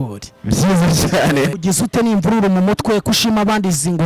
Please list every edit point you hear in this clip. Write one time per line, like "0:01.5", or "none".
0:01.5